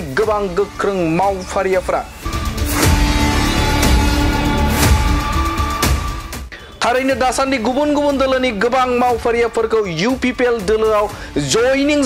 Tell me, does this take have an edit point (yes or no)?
yes